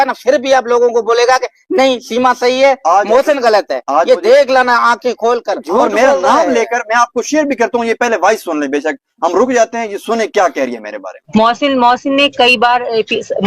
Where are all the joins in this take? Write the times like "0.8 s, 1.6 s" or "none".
5.5 s